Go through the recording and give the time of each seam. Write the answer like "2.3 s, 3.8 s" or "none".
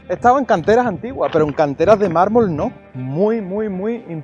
2.8 s

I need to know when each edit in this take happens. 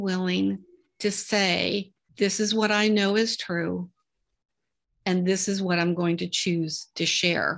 2.0 s

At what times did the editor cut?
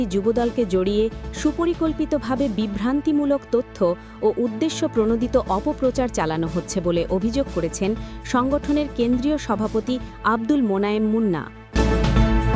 11.6 s

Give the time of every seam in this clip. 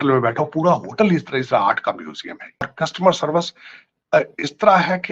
2.7 s

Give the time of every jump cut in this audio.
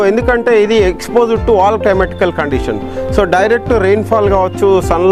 none

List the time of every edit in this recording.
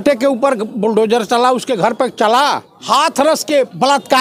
2.7 s

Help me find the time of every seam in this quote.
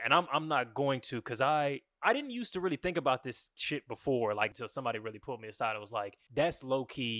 4.5 s, 6.2 s

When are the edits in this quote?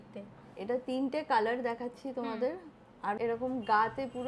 3.2 s

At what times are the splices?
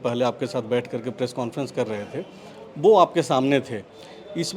none

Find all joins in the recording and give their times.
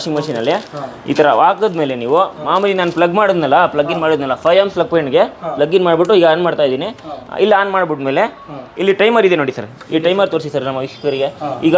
none

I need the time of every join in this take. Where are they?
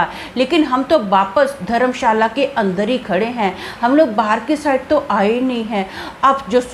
none

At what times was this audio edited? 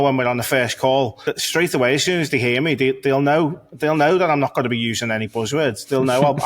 1.3 s

